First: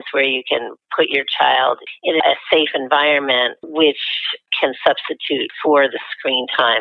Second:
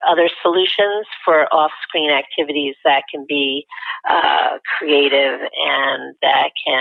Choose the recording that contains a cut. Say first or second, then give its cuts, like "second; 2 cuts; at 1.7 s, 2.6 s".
first; 4 cuts; at 2.2 s, 3.6 s, 4.5 s, 5.5 s